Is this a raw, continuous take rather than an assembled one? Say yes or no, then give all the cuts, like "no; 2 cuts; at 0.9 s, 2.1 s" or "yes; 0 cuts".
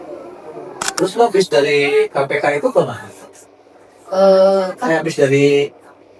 no; 1 cut; at 0.9 s